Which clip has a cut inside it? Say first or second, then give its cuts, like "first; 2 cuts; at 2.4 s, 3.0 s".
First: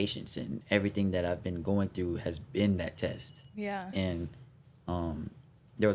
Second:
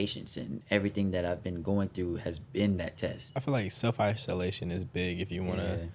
second; 1 cut; at 3.4 s